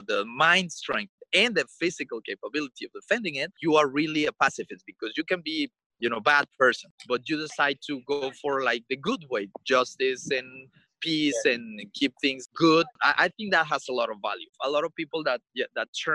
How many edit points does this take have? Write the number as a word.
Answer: six